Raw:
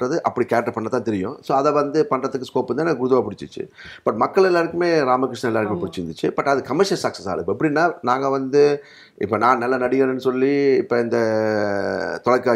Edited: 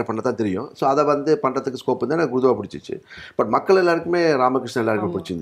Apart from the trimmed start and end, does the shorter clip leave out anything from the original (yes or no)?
no